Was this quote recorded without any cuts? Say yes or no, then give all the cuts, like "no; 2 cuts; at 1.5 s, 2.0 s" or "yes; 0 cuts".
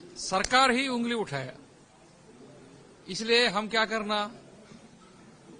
yes; 0 cuts